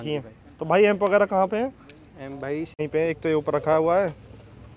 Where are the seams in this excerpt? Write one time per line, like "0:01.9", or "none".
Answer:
0:02.8